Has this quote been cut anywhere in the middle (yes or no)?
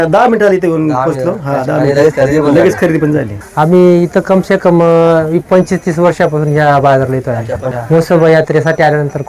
yes